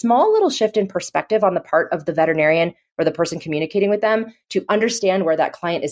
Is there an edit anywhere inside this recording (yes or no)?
no